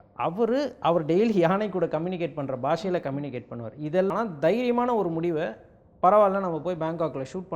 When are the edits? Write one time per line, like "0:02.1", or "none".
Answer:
0:04.1